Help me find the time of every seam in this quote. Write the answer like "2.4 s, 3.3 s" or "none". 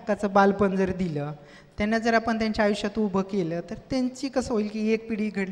none